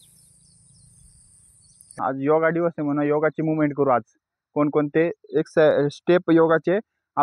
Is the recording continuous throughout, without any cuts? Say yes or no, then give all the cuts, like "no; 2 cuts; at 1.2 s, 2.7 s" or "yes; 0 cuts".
no; 1 cut; at 1.9 s